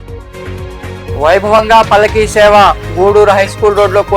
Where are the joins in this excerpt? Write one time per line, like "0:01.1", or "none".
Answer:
0:01.1